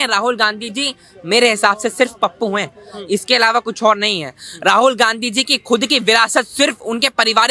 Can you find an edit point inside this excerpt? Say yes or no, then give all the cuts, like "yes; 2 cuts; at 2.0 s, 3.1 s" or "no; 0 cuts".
no; 0 cuts